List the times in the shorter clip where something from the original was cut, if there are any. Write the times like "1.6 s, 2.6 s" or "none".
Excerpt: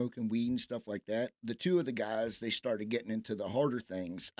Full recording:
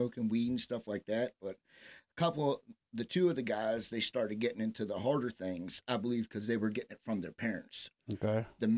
1.4 s